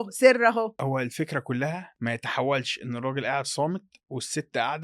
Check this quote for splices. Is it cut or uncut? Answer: cut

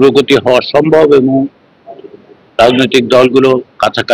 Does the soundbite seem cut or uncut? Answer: uncut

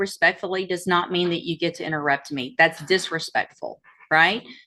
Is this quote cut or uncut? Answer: uncut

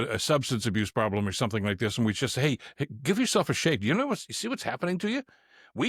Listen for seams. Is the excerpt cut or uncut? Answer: uncut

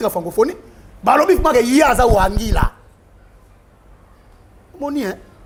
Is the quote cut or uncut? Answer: uncut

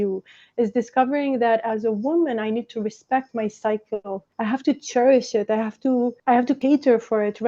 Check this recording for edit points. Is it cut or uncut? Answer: cut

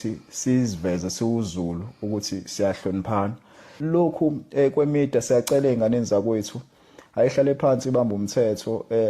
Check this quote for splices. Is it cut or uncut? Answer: cut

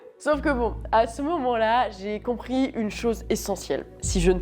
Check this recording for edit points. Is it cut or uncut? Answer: uncut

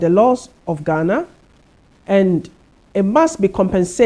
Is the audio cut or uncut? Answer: uncut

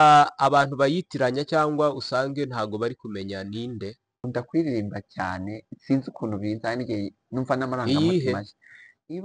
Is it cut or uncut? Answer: cut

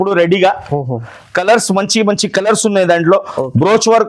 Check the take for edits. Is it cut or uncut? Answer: uncut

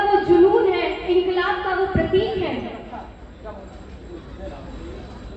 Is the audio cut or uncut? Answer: uncut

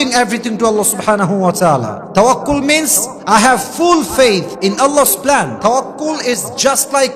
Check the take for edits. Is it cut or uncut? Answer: uncut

